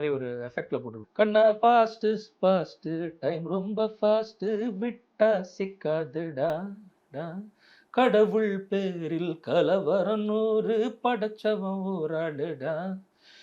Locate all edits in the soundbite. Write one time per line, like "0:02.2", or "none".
0:01.0